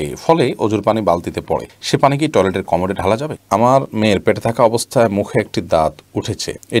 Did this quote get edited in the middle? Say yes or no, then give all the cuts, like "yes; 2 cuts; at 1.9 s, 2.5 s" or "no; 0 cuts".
yes; 1 cut; at 3.4 s